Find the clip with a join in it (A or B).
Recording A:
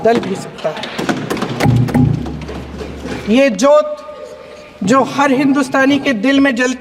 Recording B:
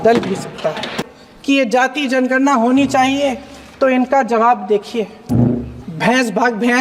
B